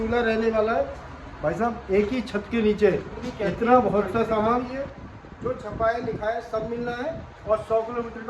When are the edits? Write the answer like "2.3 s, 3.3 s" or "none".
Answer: 4.7 s

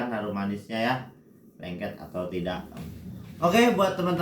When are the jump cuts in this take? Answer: 3.2 s

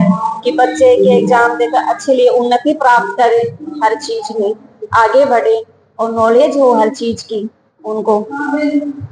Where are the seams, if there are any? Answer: none

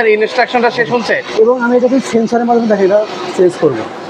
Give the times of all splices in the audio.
none

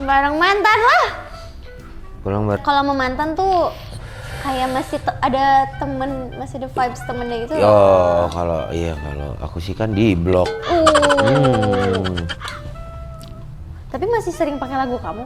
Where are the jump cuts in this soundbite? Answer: 2.6 s

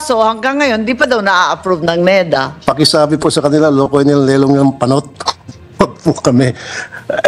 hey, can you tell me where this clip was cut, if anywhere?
none

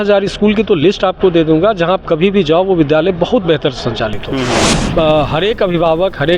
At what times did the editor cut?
4.9 s

